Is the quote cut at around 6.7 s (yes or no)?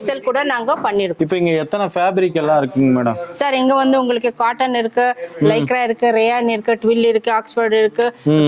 no